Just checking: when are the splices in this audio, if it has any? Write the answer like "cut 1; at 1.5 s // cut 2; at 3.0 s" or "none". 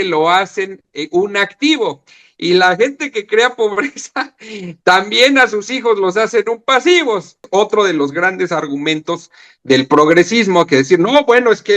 cut 1; at 7.4 s